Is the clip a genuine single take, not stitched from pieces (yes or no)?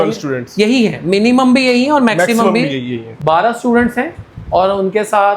yes